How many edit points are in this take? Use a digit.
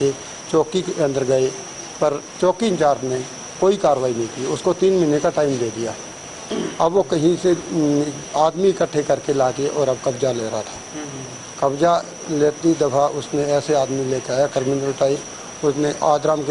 0